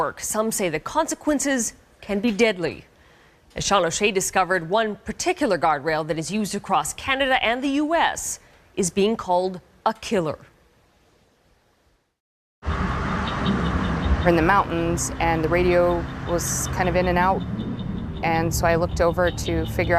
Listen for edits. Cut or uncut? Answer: cut